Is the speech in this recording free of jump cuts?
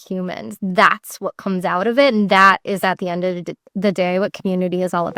yes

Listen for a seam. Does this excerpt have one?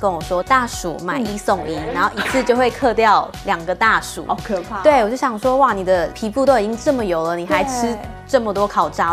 no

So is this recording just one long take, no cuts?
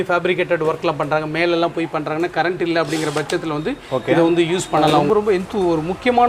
no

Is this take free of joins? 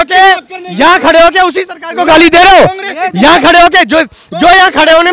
yes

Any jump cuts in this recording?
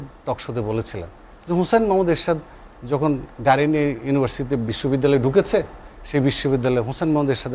no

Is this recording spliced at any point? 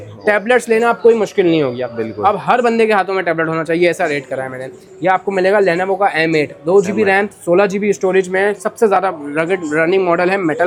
no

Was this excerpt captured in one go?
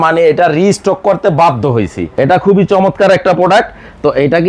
no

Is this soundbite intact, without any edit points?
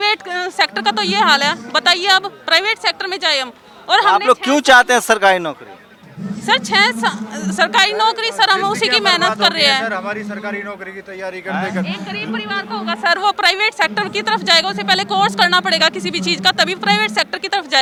yes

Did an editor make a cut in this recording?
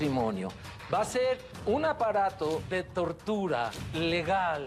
yes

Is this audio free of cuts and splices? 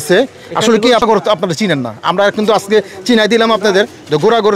no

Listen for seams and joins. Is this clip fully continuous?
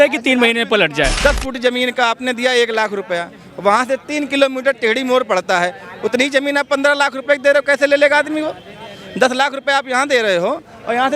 no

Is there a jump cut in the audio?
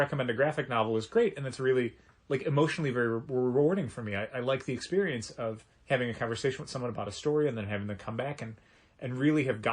yes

